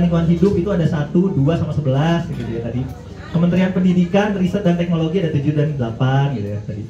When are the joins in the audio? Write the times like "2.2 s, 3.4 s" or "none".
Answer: none